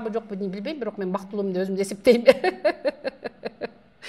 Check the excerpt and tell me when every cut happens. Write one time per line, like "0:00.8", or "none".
none